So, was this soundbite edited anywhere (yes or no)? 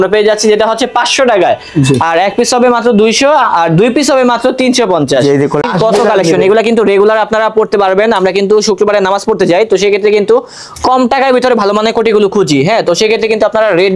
yes